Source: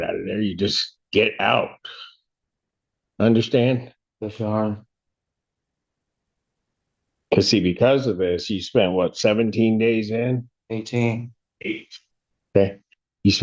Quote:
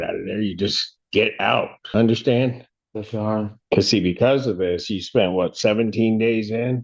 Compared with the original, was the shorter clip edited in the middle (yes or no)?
yes